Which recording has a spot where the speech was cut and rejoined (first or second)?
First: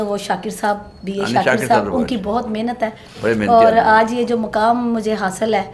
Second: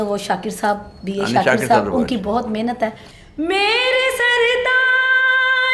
second